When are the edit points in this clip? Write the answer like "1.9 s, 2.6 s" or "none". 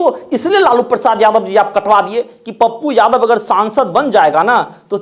none